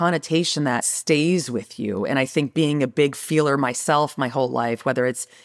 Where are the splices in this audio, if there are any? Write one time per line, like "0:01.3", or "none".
0:00.9